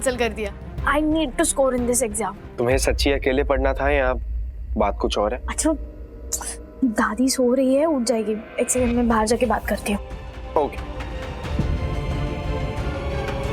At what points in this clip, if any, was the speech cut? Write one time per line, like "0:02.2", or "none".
0:02.4
0:05.5